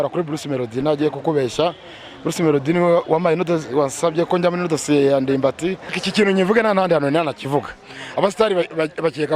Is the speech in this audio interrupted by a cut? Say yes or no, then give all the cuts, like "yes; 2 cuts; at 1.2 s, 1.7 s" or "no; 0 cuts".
yes; 1 cut; at 6.0 s